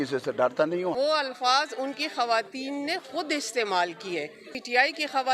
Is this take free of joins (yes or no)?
no